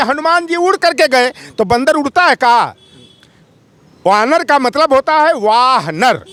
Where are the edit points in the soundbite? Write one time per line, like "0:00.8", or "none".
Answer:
none